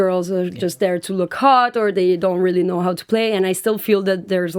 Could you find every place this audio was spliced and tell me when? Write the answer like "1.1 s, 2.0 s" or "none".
none